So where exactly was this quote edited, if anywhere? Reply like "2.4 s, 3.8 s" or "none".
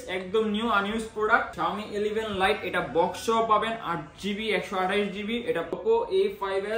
1.5 s, 5.7 s